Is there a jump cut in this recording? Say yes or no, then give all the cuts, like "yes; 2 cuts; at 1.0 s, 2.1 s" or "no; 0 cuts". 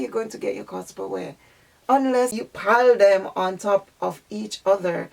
yes; 1 cut; at 2.5 s